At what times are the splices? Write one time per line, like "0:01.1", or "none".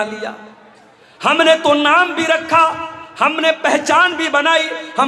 none